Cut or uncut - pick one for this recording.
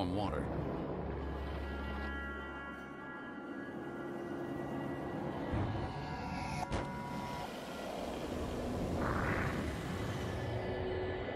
uncut